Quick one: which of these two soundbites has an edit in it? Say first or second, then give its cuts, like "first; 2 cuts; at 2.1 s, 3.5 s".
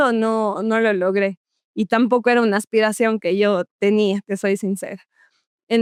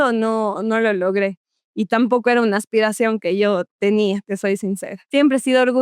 second; 1 cut; at 4.9 s